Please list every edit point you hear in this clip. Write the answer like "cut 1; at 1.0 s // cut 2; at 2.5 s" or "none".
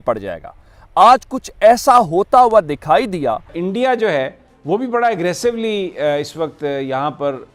cut 1; at 3.5 s